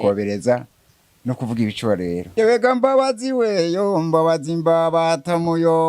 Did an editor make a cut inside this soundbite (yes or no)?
yes